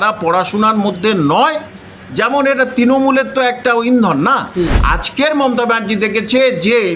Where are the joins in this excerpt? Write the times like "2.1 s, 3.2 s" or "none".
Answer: 4.8 s